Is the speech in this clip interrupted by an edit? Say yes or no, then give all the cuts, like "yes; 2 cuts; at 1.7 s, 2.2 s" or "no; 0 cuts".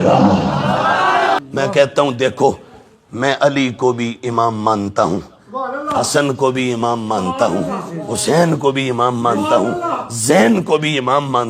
yes; 1 cut; at 1.4 s